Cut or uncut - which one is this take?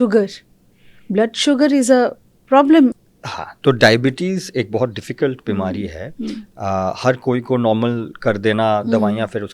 cut